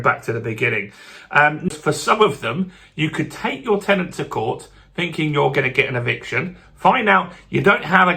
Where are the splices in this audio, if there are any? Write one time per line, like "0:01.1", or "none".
0:01.8

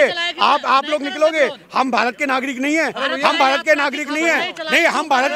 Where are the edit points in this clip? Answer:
none

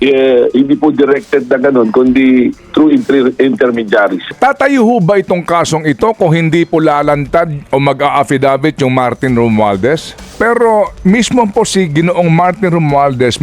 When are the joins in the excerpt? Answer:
0:04.3
0:10.4

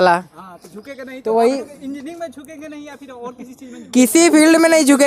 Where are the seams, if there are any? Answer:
none

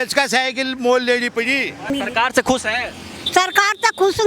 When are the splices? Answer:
0:01.9

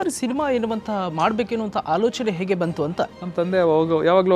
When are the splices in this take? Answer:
0:03.1

